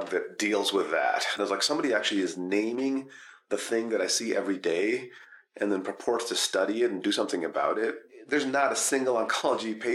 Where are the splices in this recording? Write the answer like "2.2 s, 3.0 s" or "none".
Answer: 1.4 s, 8.1 s